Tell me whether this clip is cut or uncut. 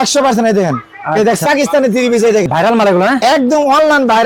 cut